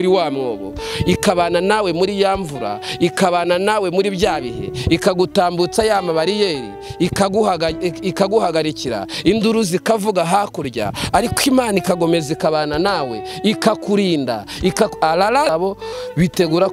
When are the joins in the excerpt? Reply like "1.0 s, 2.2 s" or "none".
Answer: 15.5 s